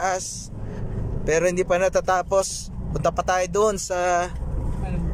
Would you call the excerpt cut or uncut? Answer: uncut